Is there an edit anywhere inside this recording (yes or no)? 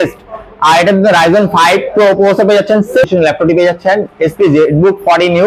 yes